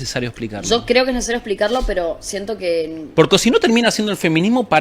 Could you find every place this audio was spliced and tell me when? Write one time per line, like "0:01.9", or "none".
none

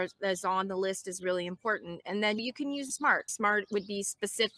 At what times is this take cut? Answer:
0:02.9

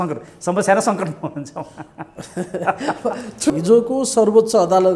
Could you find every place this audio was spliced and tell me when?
0:03.5

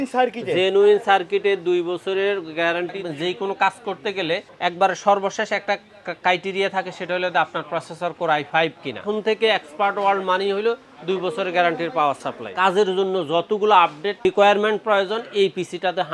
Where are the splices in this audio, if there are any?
0:03.0
0:04.5
0:09.1
0:12.4

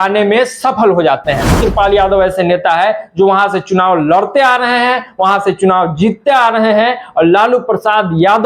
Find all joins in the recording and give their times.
0:01.6

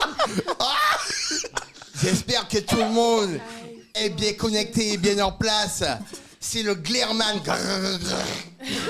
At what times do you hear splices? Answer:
none

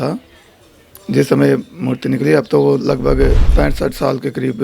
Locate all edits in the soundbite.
0:03.4

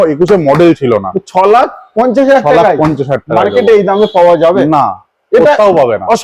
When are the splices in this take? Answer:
none

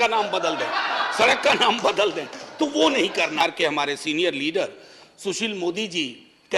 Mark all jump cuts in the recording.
0:03.4

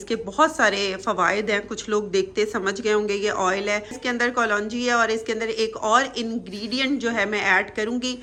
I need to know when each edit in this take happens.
none

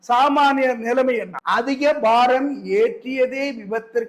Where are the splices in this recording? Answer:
0:01.3

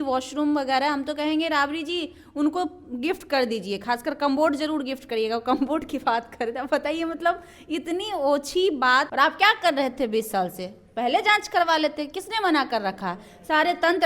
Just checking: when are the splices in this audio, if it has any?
0:09.1

